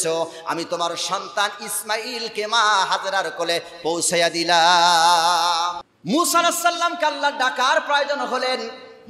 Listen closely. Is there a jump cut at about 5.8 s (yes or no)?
yes